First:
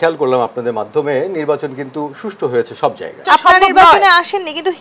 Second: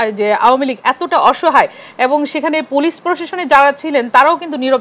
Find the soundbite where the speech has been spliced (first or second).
first